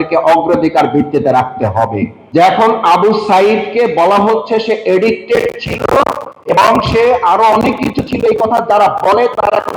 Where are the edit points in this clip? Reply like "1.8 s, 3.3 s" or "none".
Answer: 2.1 s